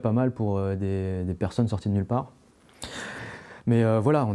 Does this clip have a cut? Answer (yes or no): no